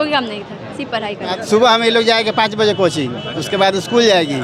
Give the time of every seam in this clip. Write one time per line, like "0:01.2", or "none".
0:01.4